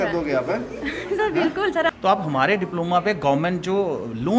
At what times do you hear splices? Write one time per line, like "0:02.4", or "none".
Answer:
0:01.9